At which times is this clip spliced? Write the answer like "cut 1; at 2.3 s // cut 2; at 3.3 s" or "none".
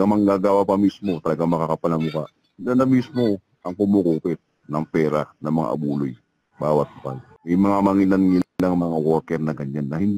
cut 1; at 7.3 s